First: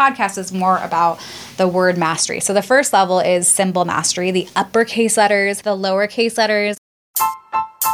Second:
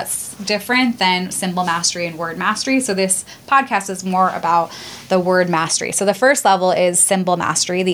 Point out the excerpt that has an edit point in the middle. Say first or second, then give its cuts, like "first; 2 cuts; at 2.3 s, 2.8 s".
first; 2 cuts; at 5.6 s, 6.8 s